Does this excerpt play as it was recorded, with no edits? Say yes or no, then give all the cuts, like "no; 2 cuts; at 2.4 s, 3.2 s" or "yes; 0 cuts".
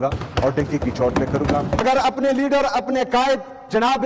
no; 1 cut; at 1.8 s